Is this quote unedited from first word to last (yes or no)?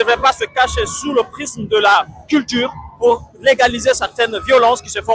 yes